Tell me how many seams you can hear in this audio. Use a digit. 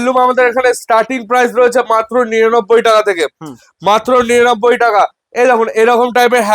0